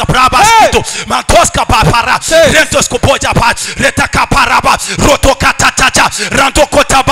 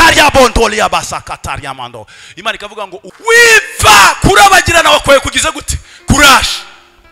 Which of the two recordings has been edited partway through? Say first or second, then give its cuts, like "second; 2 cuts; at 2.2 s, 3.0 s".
second; 1 cut; at 3.1 s